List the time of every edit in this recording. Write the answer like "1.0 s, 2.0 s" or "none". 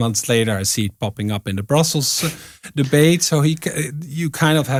none